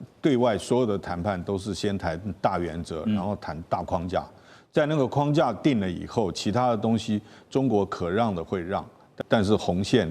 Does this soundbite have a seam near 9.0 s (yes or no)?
yes